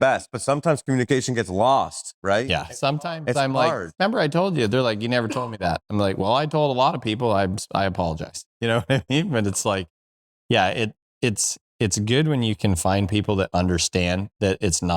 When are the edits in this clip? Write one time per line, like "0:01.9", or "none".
0:02.5